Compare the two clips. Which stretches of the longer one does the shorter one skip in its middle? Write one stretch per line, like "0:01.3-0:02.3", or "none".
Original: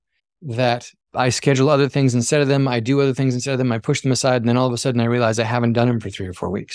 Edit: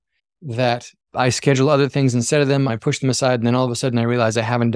0:02.7-0:03.7